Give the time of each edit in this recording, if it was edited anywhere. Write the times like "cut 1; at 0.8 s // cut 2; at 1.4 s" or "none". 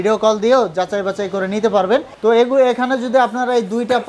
cut 1; at 2.1 s

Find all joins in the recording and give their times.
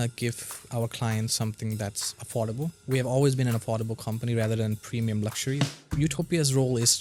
cut 1; at 2.6 s // cut 2; at 5.8 s

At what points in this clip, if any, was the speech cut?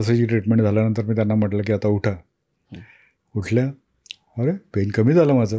none

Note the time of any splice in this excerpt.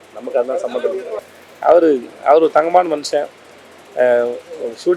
cut 1; at 1.2 s

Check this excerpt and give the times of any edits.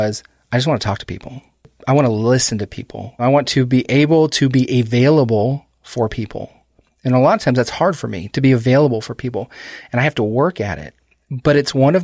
cut 1; at 1.7 s // cut 2; at 3.2 s

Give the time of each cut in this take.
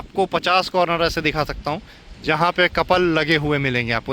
none

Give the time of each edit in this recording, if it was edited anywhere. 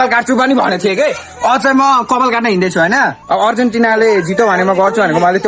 none

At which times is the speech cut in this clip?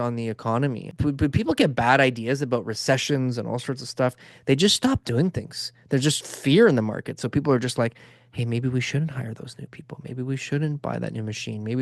cut 1; at 0.9 s

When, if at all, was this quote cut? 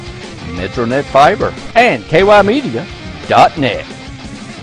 cut 1; at 1.6 s

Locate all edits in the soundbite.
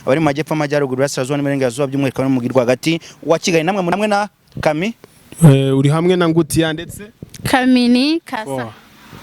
cut 1; at 3.9 s

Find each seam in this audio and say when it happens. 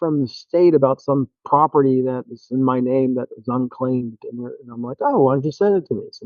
none

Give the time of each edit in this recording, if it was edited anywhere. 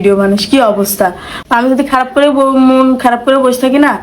cut 1; at 1.3 s

